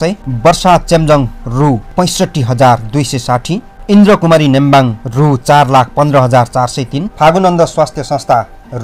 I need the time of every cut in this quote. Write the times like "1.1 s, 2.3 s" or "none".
7.0 s